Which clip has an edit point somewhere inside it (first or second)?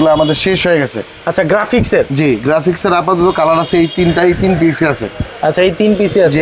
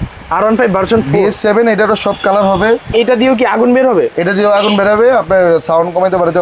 second